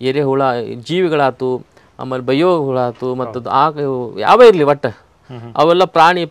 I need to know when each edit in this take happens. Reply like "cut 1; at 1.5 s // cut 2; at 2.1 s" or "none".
none